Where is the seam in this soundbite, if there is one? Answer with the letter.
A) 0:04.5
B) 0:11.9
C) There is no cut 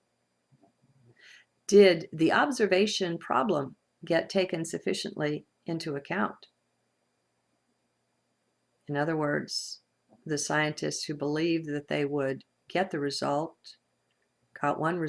A